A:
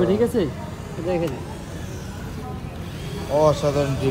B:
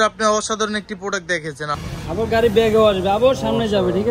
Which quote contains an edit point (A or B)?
B